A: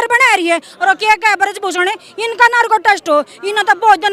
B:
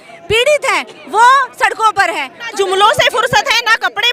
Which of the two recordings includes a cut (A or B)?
B